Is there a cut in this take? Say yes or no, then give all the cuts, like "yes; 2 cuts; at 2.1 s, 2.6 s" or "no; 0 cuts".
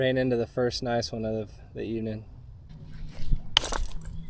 yes; 1 cut; at 2.7 s